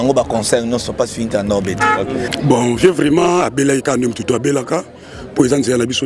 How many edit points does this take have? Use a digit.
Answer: 1